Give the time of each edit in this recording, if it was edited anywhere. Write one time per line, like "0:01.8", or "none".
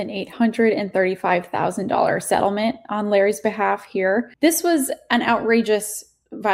0:04.3